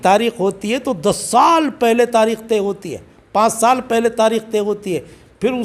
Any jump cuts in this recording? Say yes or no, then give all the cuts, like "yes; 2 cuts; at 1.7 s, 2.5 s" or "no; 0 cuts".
no; 0 cuts